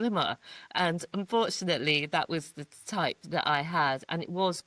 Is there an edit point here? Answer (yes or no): no